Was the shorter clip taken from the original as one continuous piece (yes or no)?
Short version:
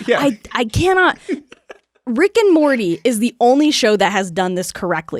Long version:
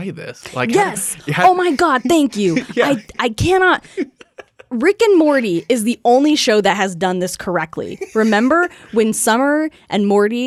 yes